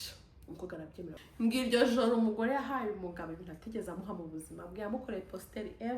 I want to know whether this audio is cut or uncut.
cut